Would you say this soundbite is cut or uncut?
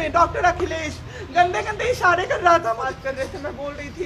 cut